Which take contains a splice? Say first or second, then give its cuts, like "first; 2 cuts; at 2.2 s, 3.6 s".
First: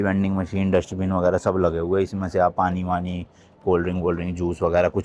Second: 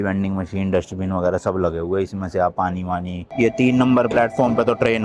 second; 1 cut; at 3.3 s